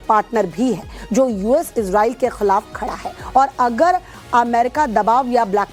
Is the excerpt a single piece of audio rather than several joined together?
yes; 0 cuts

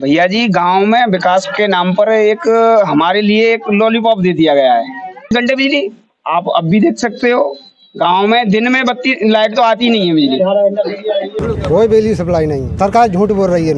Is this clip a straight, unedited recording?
no; 3 cuts; at 5.3 s, 11.3 s, 12.8 s

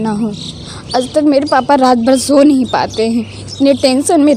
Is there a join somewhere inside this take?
no; 0 cuts

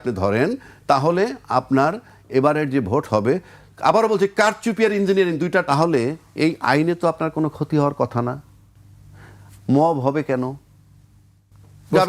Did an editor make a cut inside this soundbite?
yes; 1 cut; at 5.7 s

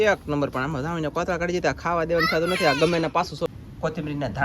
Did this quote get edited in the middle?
yes; 1 cut; at 3.5 s

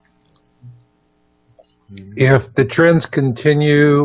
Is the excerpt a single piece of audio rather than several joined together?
yes; 0 cuts

